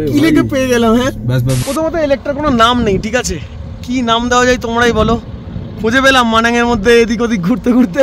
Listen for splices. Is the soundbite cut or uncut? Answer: cut